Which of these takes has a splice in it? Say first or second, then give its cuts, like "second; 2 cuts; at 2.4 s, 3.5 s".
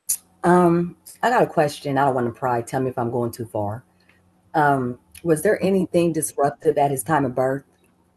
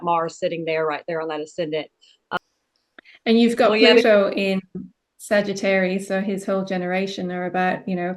second; 1 cut; at 2.4 s